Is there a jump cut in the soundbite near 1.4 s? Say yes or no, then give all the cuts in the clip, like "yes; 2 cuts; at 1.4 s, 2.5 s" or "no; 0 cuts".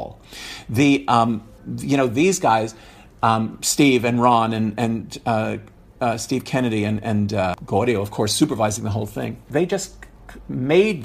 no; 2 cuts; at 7.6 s, 9.4 s